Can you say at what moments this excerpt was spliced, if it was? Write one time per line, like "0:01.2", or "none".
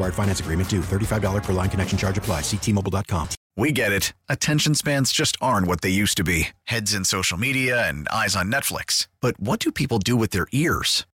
0:03.4